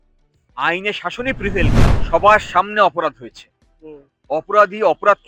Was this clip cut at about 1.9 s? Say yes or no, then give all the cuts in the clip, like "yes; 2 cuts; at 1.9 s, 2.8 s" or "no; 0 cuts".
yes; 1 cut; at 1.9 s